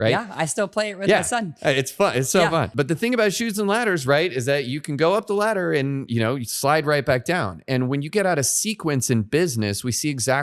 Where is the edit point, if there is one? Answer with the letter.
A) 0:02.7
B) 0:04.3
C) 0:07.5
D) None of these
A